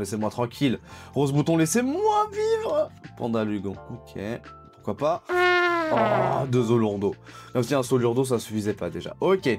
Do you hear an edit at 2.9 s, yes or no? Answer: no